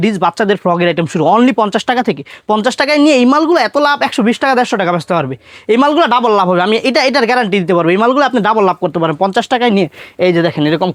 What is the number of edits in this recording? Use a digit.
0